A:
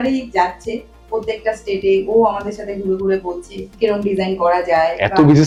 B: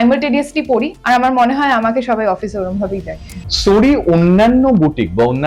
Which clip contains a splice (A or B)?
B